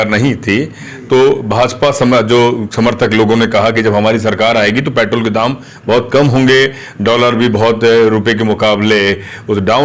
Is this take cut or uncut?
uncut